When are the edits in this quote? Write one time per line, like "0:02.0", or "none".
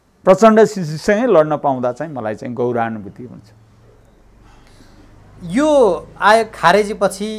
none